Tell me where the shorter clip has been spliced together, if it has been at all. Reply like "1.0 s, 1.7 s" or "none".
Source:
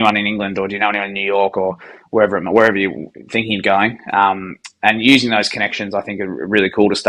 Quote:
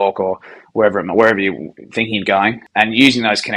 2.6 s